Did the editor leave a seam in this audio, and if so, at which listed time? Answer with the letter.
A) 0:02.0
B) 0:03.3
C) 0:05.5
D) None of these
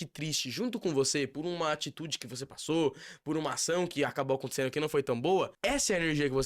C